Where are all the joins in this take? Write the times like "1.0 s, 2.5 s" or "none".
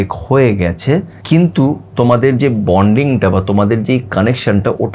1.1 s